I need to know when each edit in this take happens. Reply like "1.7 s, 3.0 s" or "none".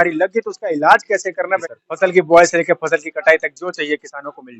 1.6 s